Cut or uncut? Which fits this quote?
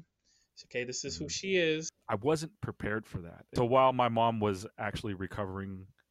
cut